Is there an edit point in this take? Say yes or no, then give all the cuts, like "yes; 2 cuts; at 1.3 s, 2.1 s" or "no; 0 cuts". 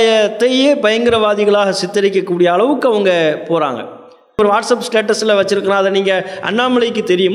yes; 1 cut; at 4.4 s